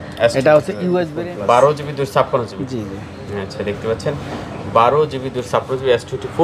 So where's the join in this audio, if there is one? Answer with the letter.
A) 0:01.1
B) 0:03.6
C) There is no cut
A